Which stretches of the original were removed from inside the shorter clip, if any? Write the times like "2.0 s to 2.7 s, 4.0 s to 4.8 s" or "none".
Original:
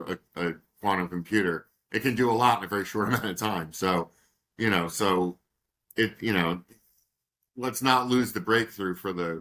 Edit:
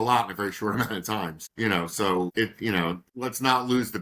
3.7 s to 4.4 s, 5.3 s to 5.9 s, 6.7 s to 7.5 s